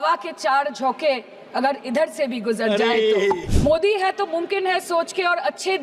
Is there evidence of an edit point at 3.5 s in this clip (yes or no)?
yes